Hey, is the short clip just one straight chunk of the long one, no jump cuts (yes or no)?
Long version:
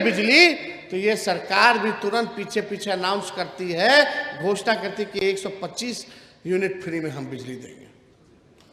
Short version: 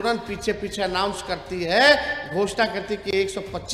yes